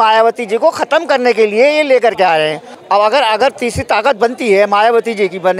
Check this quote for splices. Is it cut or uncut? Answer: cut